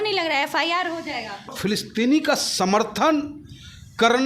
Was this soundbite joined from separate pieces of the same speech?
yes; 1 cut; at 1.5 s

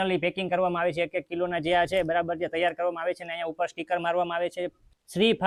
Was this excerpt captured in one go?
yes; 0 cuts

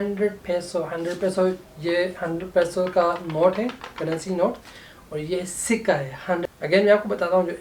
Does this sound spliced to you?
yes; 1 cut; at 6.4 s

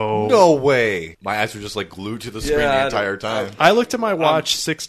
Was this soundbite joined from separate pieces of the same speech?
yes; 1 cut; at 1.1 s

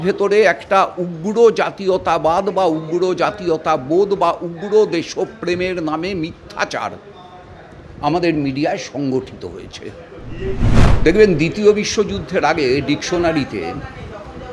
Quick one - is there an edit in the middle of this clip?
yes; 1 cut; at 10.8 s

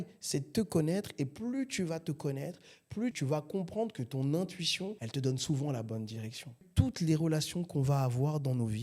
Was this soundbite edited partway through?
yes; 2 cuts; at 3.2 s, 6.6 s

